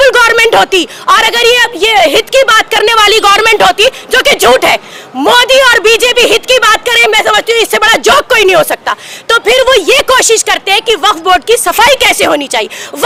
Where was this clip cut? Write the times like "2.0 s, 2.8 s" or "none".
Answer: none